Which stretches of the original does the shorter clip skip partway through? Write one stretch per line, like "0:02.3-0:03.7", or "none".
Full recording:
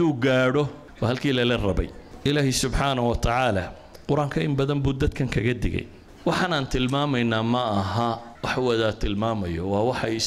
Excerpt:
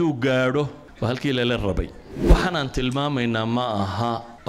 0:02.0-0:06.0